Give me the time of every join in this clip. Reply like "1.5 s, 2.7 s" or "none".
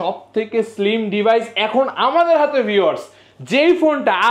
none